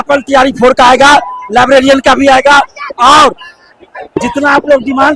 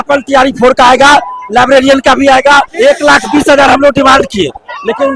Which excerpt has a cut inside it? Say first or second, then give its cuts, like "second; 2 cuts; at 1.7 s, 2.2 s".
second; 1 cut; at 2.7 s